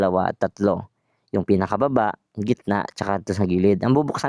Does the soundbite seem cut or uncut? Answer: uncut